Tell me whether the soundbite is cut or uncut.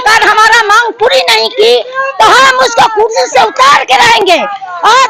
uncut